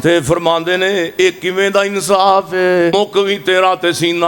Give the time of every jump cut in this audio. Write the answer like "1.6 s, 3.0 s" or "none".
2.9 s